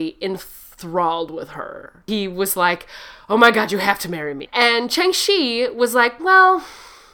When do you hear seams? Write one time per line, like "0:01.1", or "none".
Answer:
0:02.0
0:04.5